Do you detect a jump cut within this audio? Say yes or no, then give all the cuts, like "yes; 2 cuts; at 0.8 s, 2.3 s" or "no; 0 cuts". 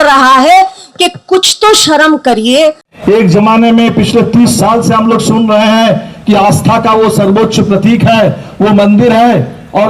yes; 1 cut; at 2.9 s